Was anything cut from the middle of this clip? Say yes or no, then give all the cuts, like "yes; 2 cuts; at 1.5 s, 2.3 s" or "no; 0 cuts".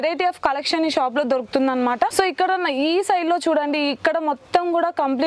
no; 0 cuts